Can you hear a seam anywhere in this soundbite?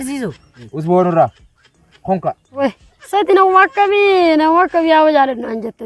yes; 1 cut; at 2.4 s

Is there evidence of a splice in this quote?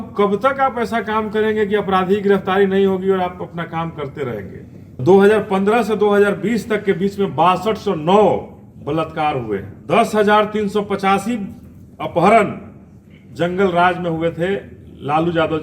yes; 2 cuts; at 5.0 s, 9.7 s

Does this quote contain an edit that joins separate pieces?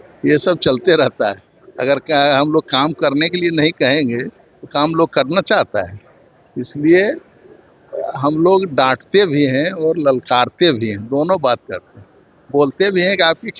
no; 0 cuts

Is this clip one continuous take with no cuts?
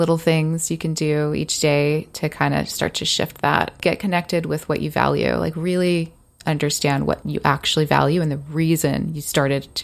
no; 2 cuts; at 3.7 s, 7.2 s

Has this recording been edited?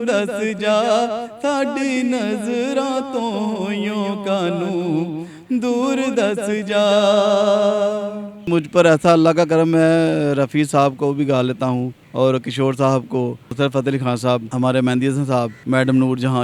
yes; 5 cuts; at 8.5 s, 12.0 s, 13.4 s, 14.5 s, 15.6 s

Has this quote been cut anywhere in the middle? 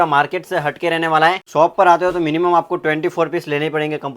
yes; 1 cut; at 1.4 s

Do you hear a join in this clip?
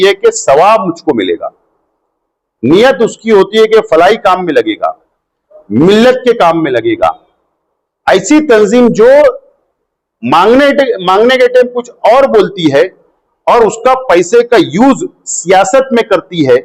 no; 0 cuts

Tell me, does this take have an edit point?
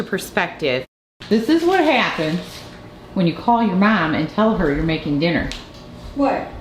yes; 1 cut; at 1.2 s

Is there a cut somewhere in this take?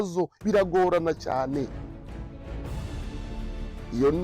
no; 0 cuts

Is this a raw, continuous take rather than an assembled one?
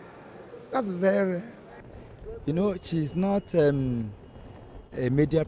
no; 1 cut; at 2.6 s

